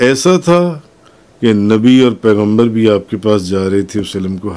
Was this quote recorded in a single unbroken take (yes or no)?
yes